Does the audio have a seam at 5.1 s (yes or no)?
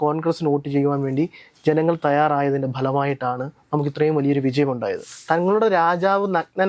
yes